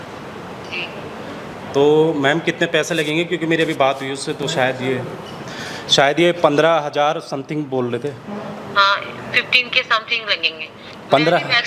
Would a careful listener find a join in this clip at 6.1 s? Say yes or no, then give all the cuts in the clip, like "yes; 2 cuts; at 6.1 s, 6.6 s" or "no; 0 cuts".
no; 0 cuts